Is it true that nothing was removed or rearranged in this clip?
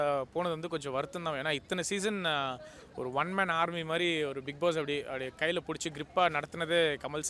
yes; 0 cuts

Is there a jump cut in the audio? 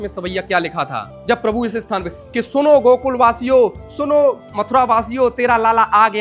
yes; 1 cut; at 1.1 s

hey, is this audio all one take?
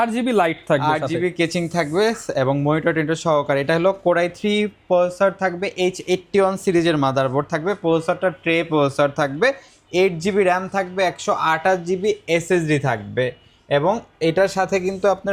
yes; 0 cuts

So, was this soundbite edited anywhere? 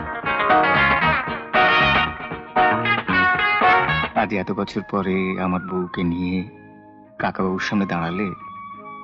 yes; 1 cut; at 4.1 s

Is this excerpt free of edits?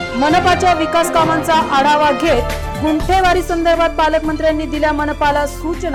yes; 0 cuts

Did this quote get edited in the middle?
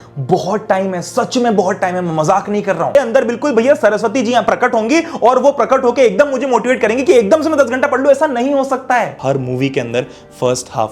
yes; 2 cuts; at 2.9 s, 9.2 s

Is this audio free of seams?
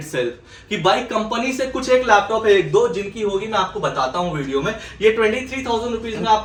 yes; 0 cuts

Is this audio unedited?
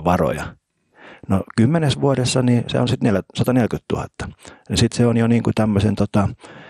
yes; 0 cuts

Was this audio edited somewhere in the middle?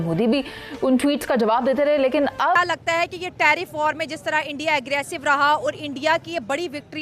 yes; 1 cut; at 2.6 s

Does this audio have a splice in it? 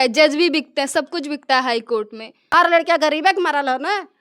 yes; 1 cut; at 2.5 s

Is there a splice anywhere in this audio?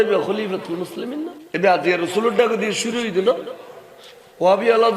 yes; 1 cut; at 1.4 s

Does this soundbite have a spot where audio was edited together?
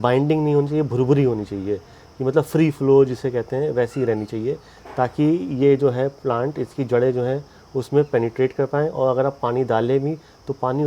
no; 0 cuts

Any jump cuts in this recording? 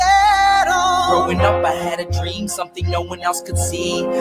yes; 1 cut; at 1.0 s

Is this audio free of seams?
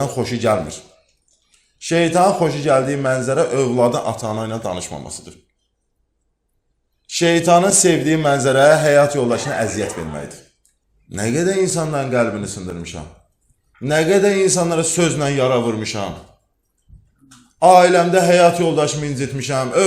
no; 1 cut; at 11.2 s

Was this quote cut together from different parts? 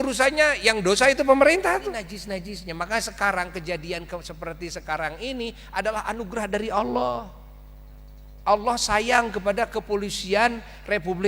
yes; 1 cut; at 2.1 s

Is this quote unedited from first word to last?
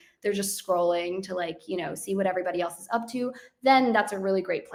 yes; 0 cuts

